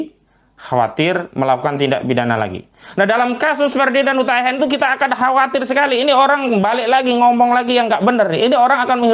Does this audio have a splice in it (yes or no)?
no